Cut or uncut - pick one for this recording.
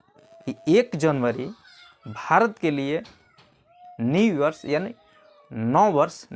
uncut